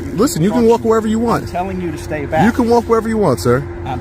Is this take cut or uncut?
uncut